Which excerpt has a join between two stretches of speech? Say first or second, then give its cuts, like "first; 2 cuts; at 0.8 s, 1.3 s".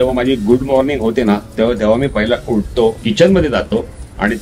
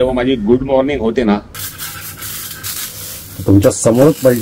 second; 1 cut; at 1.5 s